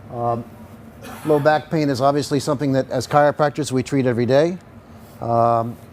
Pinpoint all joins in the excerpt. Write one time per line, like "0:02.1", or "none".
0:04.4